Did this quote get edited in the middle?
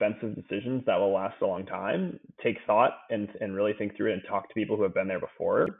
no; 0 cuts

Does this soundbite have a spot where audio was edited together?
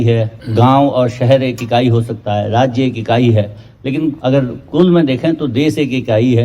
yes; 1 cut; at 4.2 s

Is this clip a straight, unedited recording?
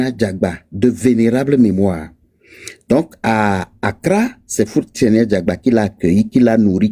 yes; 0 cuts

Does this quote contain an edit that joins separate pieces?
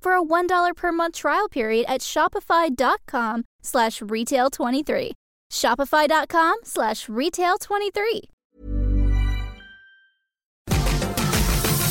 yes; 1 cut; at 10.7 s

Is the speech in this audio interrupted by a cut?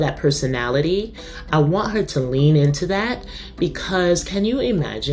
yes; 1 cut; at 1.3 s

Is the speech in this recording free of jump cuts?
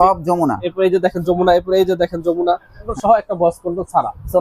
no; 1 cut; at 2.8 s

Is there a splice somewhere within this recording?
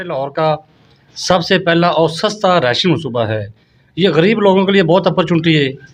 no; 0 cuts

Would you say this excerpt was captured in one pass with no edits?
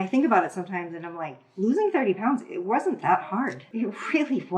no; 1 cut; at 3.6 s

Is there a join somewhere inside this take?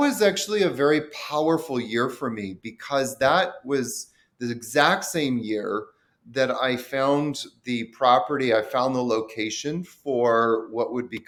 no; 0 cuts

